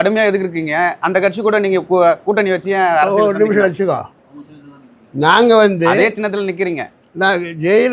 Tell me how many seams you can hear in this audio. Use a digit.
0